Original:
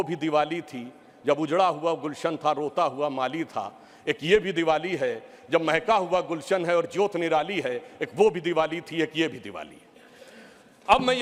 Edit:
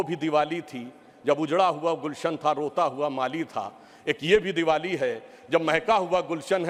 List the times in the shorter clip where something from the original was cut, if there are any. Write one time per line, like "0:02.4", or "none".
none